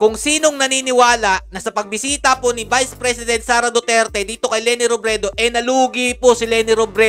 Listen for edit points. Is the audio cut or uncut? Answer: uncut